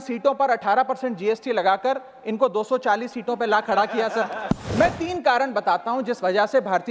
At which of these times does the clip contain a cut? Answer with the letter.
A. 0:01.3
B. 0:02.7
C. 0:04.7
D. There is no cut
C